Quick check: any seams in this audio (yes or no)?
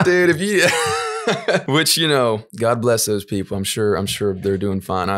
yes